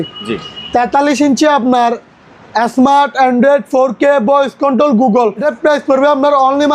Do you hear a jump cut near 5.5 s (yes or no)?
yes